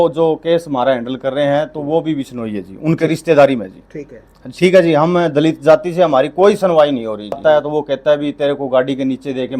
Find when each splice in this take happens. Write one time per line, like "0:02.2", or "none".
0:07.2

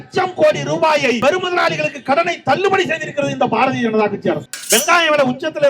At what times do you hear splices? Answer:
0:01.2
0:04.5

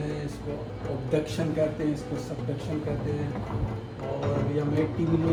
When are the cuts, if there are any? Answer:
none

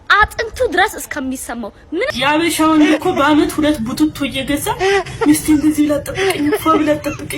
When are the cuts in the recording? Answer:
0:02.1

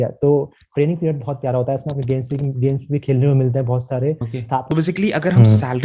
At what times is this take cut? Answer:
0:04.7

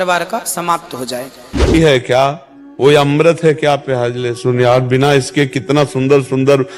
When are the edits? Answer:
0:01.7

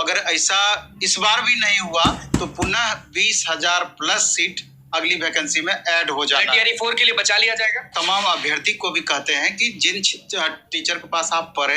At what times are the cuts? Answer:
0:07.9

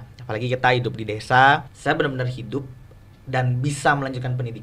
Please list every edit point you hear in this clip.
0:01.7

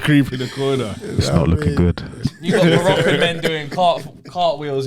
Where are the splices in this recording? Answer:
0:02.2

